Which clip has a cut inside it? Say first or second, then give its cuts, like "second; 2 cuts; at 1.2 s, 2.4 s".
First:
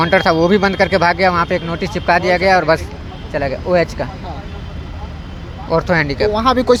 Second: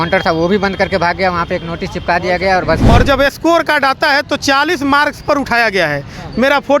second; 1 cut; at 2.8 s